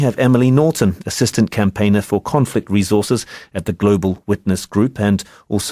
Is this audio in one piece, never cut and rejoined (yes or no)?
no